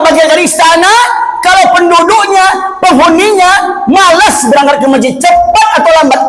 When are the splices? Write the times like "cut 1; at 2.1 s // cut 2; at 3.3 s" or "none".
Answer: none